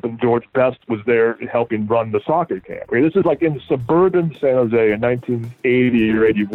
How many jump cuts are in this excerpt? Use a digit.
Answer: 0